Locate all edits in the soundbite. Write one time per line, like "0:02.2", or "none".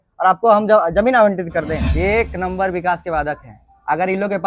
0:01.8